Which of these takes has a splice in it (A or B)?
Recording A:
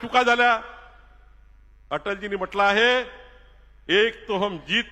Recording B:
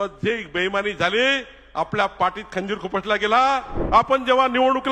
B